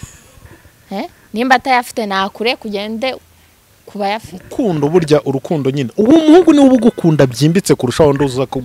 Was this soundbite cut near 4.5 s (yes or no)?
yes